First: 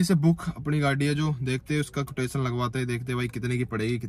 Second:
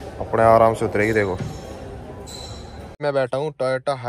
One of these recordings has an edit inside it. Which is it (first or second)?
second